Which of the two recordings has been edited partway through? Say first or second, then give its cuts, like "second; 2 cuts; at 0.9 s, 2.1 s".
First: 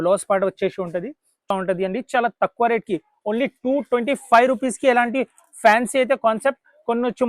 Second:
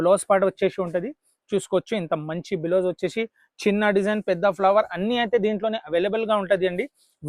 first; 1 cut; at 1.5 s